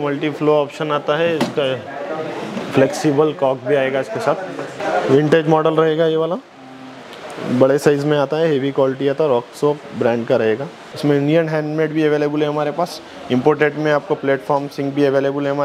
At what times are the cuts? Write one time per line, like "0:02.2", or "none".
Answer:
0:04.7
0:10.7